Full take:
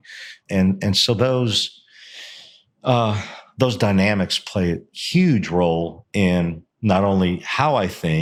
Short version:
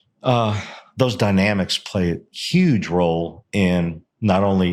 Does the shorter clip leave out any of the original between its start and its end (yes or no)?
no